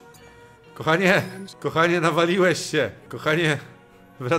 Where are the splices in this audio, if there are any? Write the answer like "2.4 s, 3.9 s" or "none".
1.4 s, 3.1 s